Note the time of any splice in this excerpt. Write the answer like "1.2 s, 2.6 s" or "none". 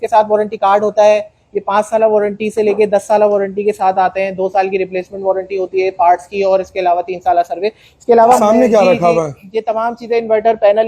8.4 s